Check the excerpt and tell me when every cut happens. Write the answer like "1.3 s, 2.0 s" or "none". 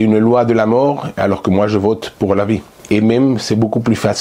2.7 s